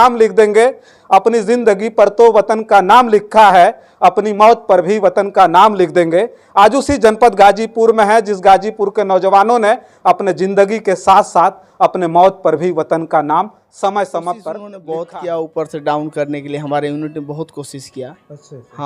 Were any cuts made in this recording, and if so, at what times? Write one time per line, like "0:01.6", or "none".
0:14.7

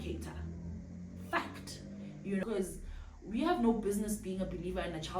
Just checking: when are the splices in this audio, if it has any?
0:02.4

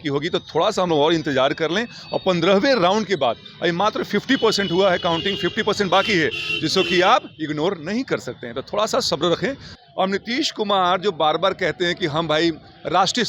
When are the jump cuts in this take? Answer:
0:09.7

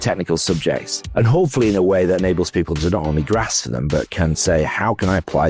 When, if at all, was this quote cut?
0:01.0

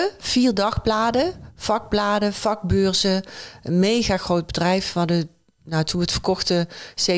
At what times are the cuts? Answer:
none

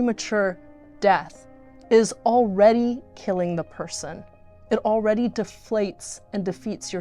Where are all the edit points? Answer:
none

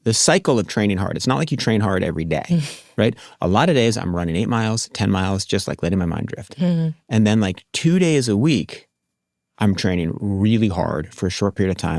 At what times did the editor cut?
none

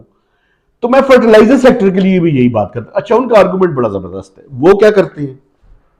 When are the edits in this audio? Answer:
none

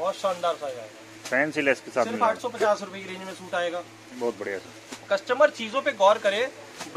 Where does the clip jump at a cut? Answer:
none

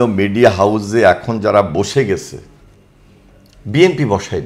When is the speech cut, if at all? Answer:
none

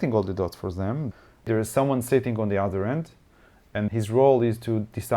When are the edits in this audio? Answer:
0:01.5
0:03.9

